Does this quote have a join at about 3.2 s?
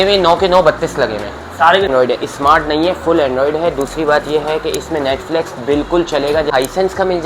no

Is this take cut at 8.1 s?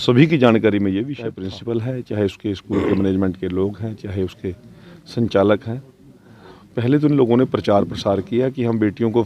no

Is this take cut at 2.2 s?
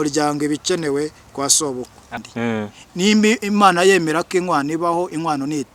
yes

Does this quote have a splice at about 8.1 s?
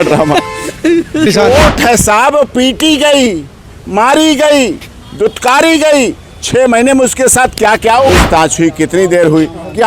yes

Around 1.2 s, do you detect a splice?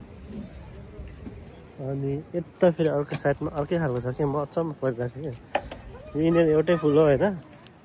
no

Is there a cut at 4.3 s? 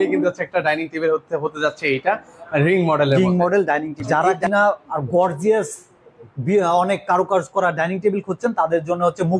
yes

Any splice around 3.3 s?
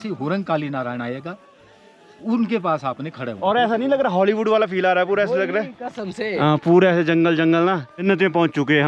yes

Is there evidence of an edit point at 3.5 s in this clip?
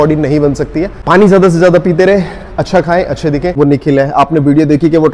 yes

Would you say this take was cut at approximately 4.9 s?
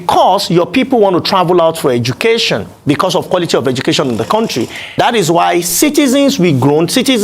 yes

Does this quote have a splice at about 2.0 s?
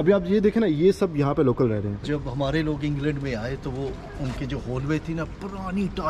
yes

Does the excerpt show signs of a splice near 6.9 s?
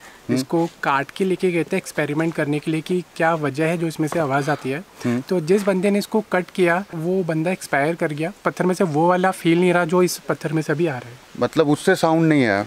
yes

